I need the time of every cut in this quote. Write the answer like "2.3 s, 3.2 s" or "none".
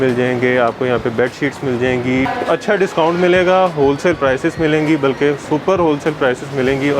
2.3 s, 5.4 s